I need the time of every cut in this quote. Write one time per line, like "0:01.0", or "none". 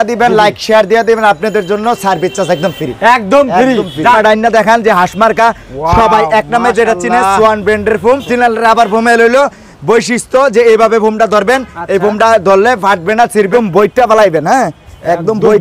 0:04.2
0:08.3
0:13.5